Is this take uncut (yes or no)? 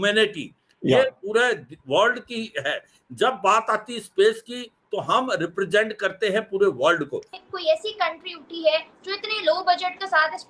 no